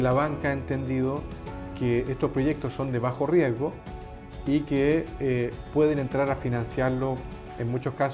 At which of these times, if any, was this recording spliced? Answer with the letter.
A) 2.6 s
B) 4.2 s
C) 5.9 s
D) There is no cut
D